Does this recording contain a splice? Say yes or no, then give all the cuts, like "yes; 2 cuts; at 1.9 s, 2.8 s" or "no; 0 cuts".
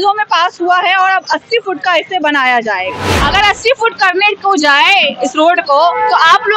yes; 1 cut; at 3.1 s